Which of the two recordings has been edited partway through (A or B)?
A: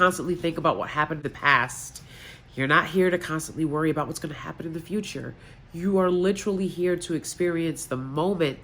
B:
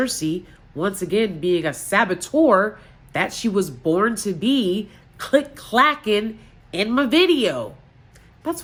A